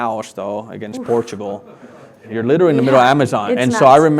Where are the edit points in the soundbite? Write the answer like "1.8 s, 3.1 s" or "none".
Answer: 2.2 s